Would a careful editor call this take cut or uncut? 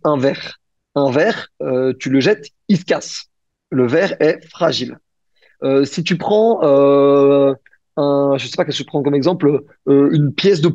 uncut